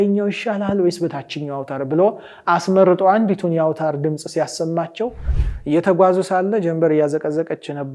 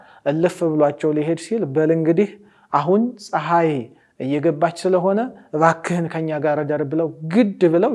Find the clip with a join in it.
first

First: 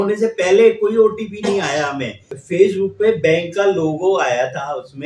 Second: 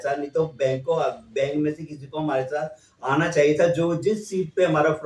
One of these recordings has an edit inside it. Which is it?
first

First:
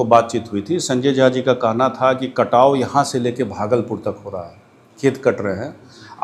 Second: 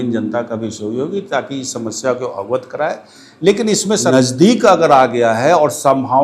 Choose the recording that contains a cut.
second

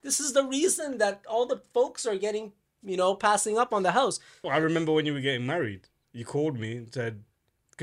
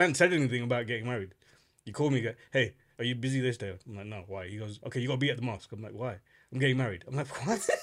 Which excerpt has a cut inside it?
first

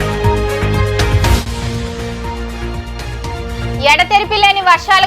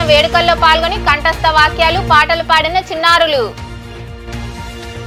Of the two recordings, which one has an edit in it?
first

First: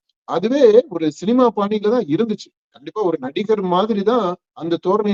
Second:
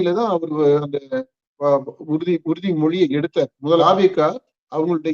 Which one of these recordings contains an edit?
second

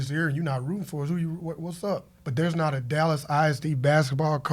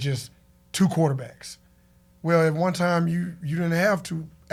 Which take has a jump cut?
first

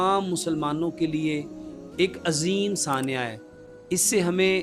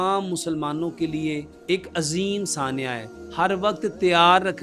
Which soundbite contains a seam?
second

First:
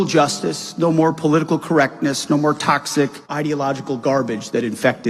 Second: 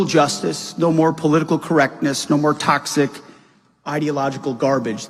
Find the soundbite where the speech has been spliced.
first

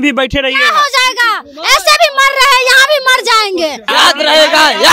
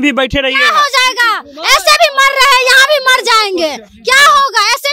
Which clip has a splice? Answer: first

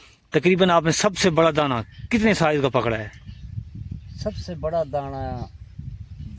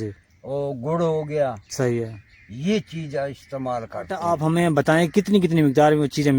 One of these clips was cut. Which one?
second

